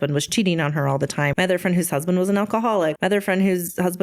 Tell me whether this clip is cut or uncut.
cut